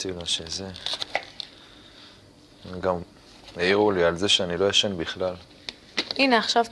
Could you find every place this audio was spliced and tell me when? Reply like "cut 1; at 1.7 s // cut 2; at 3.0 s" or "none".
cut 1; at 1.4 s

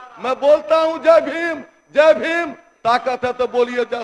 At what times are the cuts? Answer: none

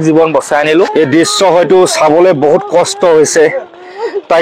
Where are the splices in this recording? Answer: cut 1; at 0.9 s

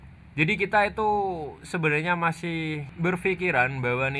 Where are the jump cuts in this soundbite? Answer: cut 1; at 2.9 s

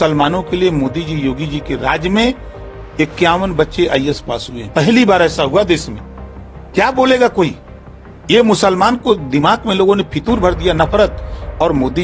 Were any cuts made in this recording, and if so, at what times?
none

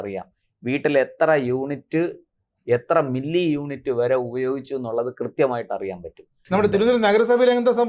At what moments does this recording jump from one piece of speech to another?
cut 1; at 6.4 s

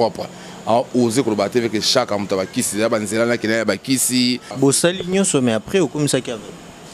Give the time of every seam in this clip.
cut 1; at 4.5 s

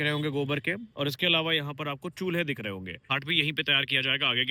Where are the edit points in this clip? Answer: cut 1; at 3.1 s

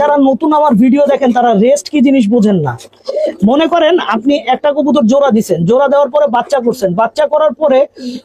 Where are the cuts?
none

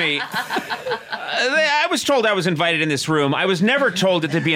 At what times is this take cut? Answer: none

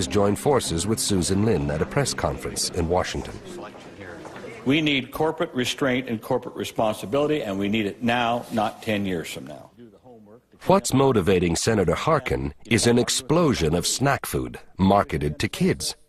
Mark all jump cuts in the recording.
cut 1; at 5.7 s

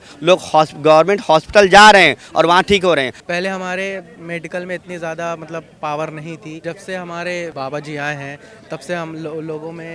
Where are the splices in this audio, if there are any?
cut 1; at 3.2 s // cut 2; at 6.6 s // cut 3; at 7.5 s

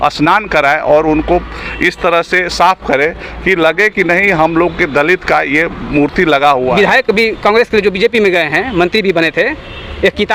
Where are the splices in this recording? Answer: cut 1; at 6.7 s

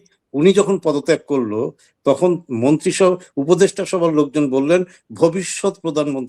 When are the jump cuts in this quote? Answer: none

